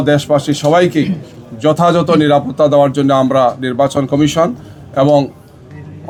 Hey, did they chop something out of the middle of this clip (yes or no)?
no